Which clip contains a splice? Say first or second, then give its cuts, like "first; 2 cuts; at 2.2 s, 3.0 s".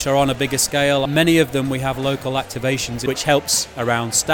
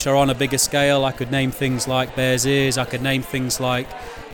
first; 2 cuts; at 1.1 s, 3.0 s